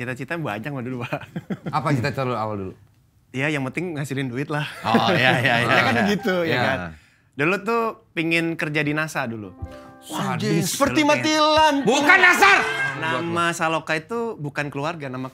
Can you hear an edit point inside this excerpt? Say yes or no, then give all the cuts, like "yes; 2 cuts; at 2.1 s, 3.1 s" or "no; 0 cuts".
yes; 1 cut; at 12.9 s